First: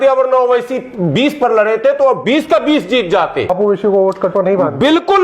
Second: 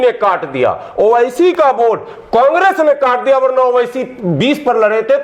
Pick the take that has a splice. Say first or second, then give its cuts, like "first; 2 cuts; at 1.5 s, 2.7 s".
first; 1 cut; at 3.5 s